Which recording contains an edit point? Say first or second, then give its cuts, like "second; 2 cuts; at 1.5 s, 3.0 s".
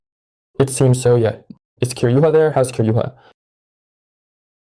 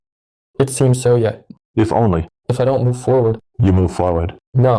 first; 1 cut; at 1.5 s